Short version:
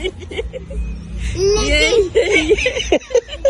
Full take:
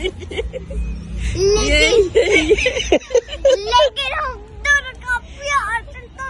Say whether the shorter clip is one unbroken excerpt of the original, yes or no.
yes